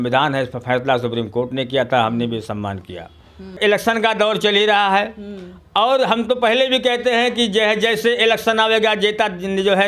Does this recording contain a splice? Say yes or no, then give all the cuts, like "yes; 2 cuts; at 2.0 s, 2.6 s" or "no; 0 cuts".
yes; 1 cut; at 3.6 s